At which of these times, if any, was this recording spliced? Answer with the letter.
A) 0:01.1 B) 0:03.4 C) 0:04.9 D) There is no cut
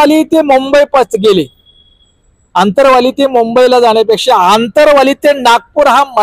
D